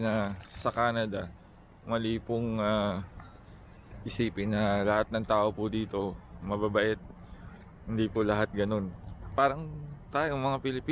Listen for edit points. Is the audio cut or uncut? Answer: uncut